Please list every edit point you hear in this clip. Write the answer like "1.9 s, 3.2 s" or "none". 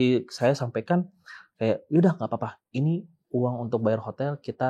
none